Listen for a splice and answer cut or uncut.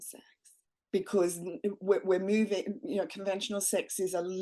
uncut